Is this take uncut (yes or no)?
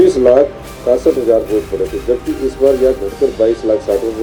yes